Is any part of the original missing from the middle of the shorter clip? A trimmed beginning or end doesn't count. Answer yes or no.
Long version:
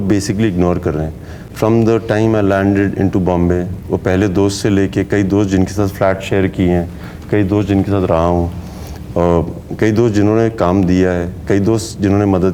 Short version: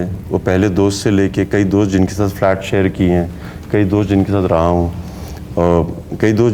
no